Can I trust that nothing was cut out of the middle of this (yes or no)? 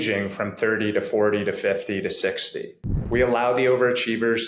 no